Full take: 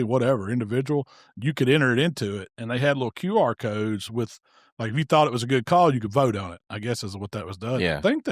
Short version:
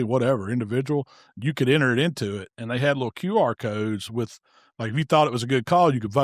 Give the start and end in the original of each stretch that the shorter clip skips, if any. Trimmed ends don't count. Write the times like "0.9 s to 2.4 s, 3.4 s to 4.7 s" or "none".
none